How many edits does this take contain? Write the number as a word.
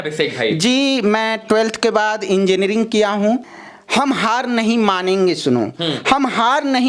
one